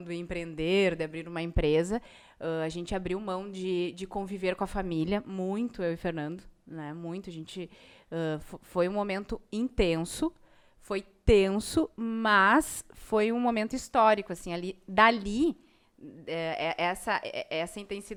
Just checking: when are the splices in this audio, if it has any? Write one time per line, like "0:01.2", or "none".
none